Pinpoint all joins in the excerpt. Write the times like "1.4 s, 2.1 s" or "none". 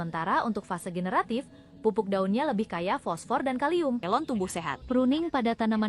4.0 s